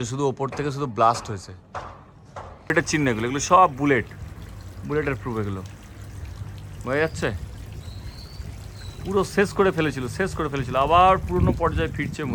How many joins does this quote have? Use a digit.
1